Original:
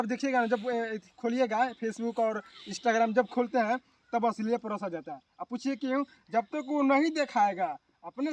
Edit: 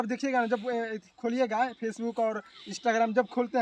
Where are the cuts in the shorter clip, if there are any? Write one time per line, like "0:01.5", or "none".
none